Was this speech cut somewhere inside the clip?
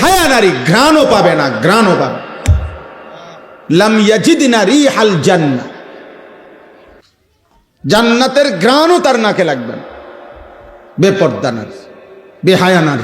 yes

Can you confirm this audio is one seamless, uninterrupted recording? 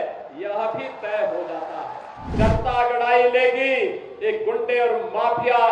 no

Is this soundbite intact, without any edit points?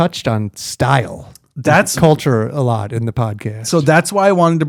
yes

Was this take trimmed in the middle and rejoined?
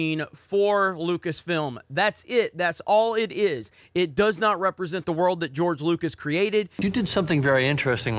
yes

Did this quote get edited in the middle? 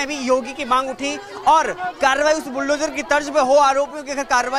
no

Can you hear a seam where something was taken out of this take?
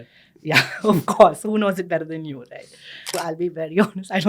yes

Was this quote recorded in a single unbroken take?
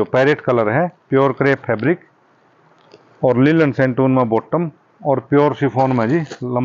yes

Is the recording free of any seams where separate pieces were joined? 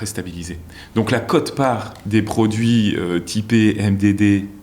no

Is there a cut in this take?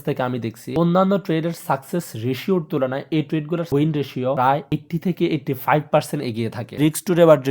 yes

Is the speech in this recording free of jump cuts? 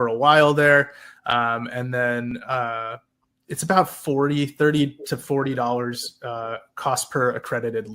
yes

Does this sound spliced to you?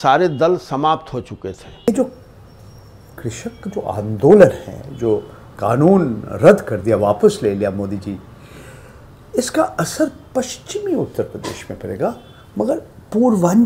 yes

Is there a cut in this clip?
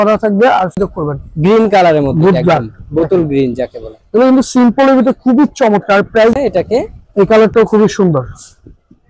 yes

